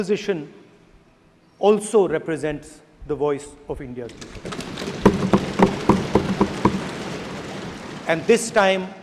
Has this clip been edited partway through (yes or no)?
no